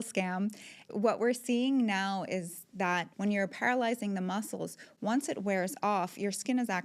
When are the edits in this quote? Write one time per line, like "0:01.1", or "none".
0:00.9
0:03.1